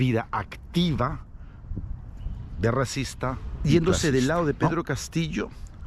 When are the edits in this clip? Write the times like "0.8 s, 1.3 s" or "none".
3.5 s